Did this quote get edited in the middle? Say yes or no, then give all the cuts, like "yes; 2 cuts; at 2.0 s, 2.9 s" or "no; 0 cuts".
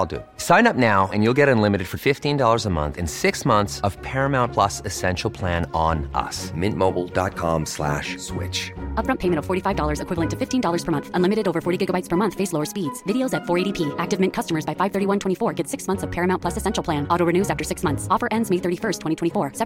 no; 0 cuts